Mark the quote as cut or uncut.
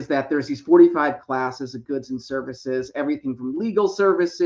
uncut